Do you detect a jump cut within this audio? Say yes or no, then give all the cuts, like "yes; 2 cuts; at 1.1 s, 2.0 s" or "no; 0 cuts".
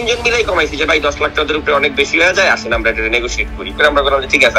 yes; 1 cut; at 3.7 s